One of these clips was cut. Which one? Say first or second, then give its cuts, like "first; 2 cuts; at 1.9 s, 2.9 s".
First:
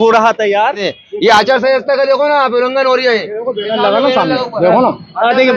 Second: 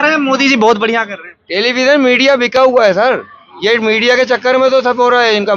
first; 1 cut; at 0.9 s